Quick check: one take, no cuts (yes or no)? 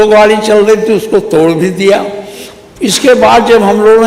yes